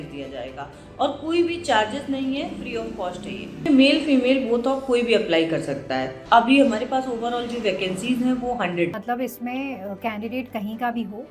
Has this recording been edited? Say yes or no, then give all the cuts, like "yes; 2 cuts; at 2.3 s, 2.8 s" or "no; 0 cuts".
yes; 3 cuts; at 3.7 s, 6.2 s, 8.9 s